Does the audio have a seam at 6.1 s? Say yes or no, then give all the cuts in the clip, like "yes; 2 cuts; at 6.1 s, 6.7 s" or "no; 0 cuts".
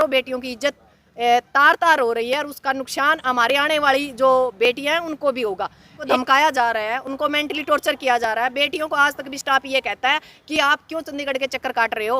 yes; 1 cut; at 6.1 s